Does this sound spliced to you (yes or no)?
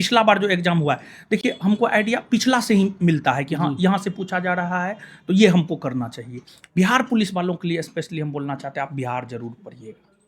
no